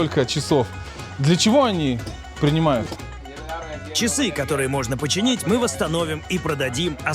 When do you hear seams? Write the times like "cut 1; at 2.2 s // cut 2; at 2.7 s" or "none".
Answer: none